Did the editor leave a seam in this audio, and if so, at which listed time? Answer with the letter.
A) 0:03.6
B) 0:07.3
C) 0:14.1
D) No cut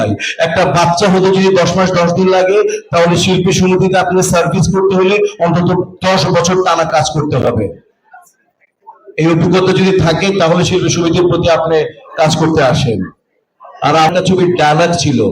C